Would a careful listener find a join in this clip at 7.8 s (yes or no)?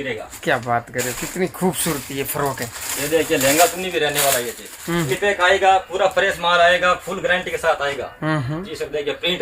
no